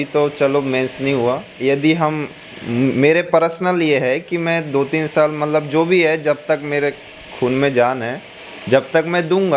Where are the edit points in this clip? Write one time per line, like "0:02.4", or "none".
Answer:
0:01.5